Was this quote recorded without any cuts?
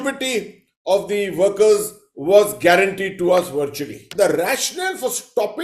no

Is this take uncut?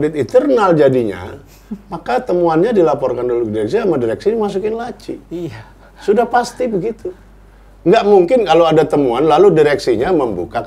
yes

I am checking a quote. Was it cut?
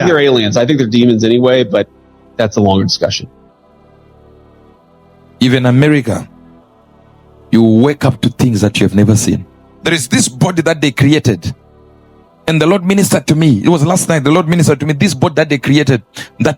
yes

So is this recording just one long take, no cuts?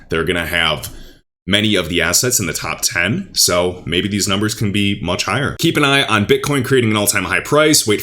no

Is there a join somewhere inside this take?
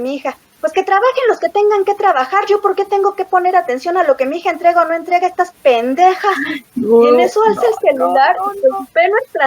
no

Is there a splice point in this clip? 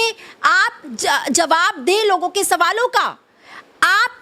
no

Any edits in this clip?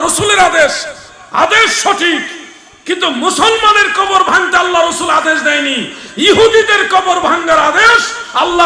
no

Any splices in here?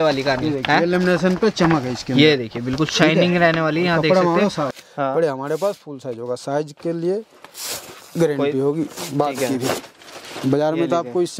yes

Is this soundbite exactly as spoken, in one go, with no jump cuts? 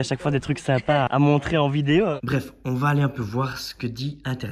no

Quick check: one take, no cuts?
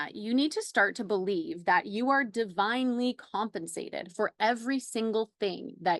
yes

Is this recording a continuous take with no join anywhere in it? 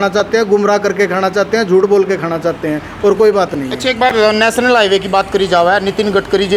yes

